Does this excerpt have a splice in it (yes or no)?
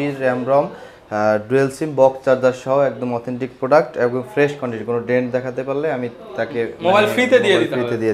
no